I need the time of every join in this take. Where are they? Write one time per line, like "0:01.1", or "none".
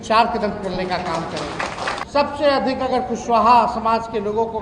0:02.0